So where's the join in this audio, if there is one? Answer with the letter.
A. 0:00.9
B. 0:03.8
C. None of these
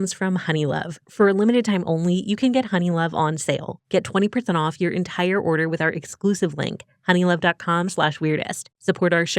A